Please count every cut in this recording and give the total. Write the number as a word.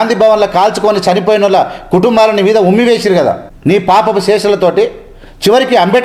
one